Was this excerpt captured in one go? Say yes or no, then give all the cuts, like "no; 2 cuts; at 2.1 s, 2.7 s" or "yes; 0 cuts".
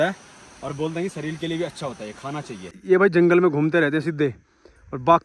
no; 1 cut; at 2.7 s